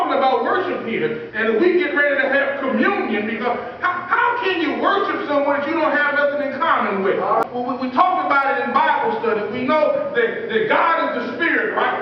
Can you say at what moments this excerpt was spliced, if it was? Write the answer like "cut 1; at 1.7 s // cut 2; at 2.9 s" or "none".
cut 1; at 7.4 s